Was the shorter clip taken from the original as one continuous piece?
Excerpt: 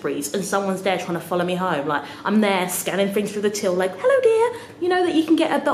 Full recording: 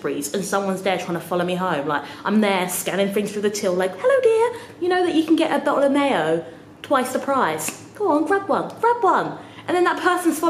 yes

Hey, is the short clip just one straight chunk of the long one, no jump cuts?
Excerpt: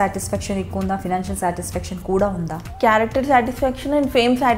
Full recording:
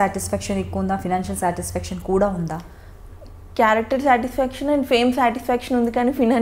no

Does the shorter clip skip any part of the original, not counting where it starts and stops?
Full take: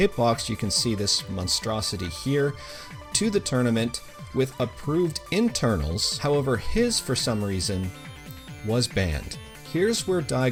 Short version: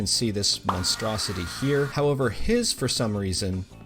yes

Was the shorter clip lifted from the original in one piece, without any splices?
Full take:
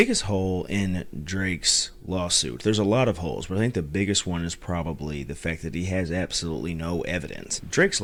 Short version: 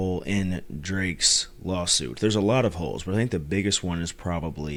yes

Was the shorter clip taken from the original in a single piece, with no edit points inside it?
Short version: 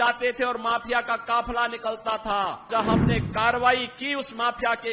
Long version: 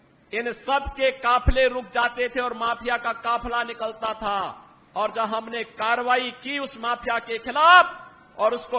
no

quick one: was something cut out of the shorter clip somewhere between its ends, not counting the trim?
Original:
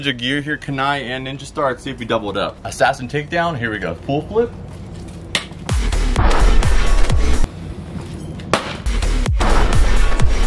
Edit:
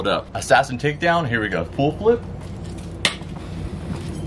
yes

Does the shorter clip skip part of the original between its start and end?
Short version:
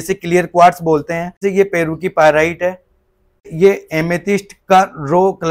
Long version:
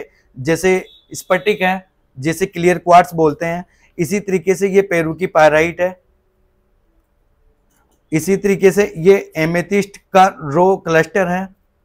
yes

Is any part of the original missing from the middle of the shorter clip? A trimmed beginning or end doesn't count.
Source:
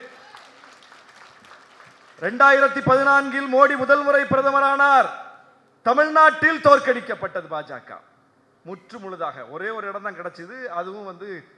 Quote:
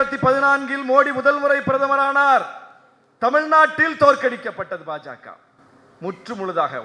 no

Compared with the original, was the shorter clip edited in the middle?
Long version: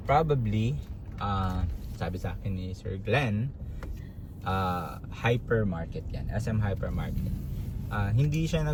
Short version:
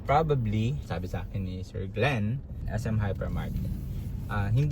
yes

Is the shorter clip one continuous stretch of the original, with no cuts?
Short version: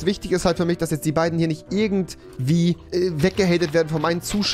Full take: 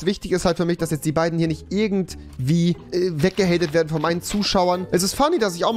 yes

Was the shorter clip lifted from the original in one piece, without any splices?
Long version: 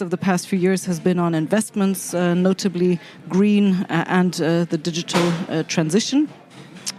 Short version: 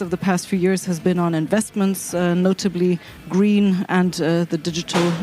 no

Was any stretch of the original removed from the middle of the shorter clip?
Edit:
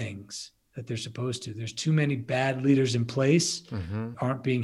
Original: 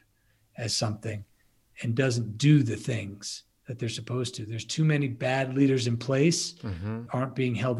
no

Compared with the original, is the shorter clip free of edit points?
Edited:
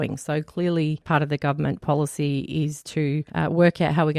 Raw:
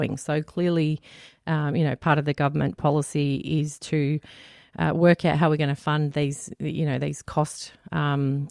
no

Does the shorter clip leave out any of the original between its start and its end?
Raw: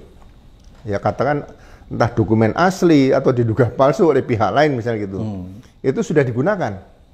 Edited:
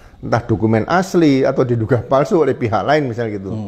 no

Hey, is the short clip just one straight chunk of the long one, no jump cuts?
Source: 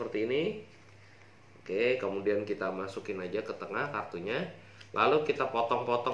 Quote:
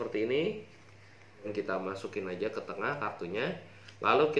no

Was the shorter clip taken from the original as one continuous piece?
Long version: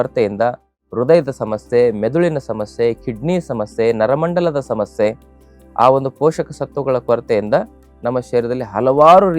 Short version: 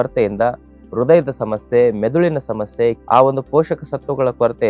no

